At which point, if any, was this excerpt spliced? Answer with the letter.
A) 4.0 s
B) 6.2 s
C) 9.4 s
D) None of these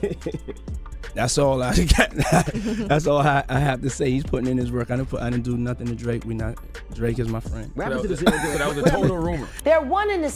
C